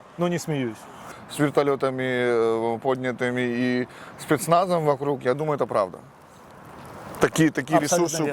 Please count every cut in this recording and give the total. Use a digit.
1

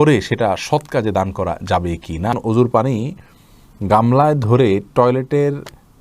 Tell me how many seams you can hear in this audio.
1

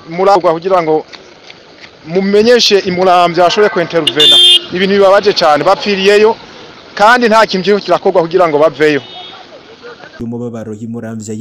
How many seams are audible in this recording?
1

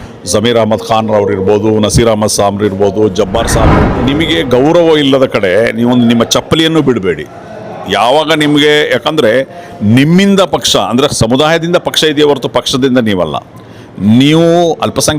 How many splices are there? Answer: 1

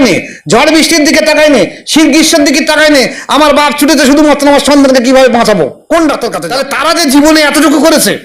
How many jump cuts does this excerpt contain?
1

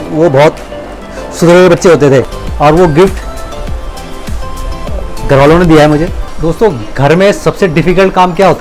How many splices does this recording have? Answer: 2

